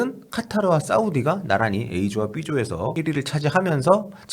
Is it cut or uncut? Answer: cut